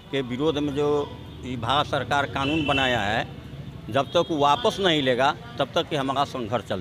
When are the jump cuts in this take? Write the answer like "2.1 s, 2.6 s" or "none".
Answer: none